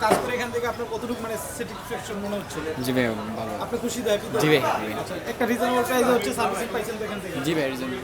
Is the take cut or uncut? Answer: uncut